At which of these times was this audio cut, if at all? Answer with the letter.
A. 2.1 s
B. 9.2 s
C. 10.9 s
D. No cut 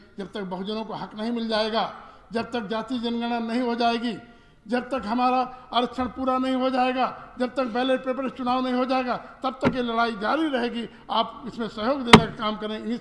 D